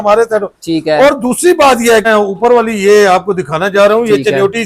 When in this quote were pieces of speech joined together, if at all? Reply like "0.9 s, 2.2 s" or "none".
2.0 s